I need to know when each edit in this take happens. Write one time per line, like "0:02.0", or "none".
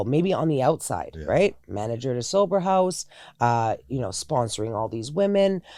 none